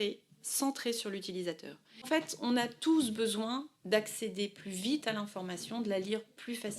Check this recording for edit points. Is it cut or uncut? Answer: cut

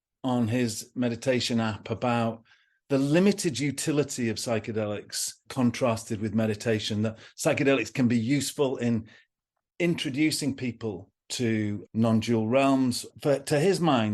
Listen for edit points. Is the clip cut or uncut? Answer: cut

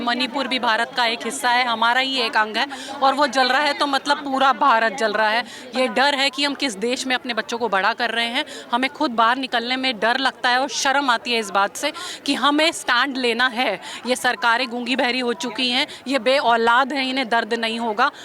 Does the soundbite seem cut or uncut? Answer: cut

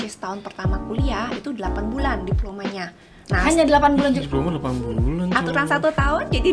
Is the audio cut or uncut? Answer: uncut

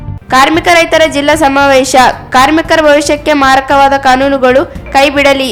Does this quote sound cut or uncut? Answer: uncut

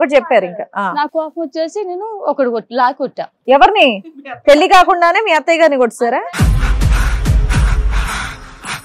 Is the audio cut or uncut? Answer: cut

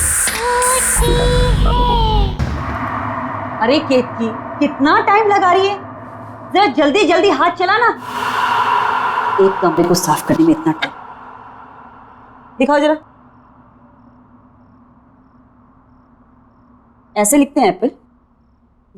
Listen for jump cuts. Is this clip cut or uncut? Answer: cut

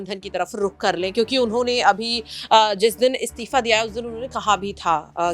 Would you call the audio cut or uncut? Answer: uncut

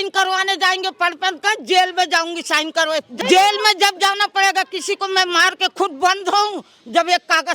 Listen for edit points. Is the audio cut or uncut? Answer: cut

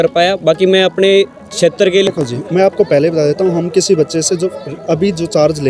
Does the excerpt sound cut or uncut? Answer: cut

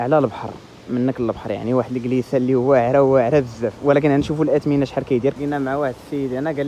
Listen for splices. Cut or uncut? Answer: cut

